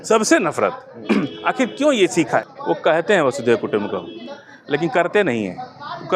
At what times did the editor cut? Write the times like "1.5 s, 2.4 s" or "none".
2.5 s